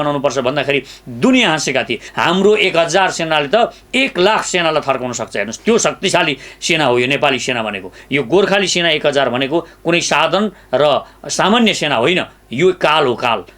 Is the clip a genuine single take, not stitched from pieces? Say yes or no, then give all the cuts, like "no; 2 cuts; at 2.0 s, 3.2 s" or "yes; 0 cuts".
no; 2 cuts; at 2.0 s, 8.0 s